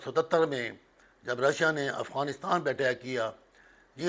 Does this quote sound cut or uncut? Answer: uncut